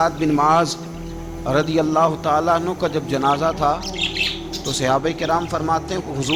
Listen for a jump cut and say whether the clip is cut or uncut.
uncut